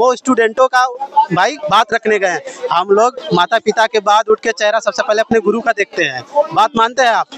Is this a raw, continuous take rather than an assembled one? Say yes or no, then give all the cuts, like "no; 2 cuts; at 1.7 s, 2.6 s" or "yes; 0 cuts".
yes; 0 cuts